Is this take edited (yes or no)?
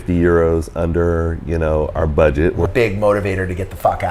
yes